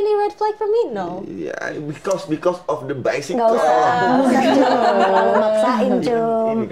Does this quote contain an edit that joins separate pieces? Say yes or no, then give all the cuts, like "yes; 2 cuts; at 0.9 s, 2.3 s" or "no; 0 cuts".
no; 0 cuts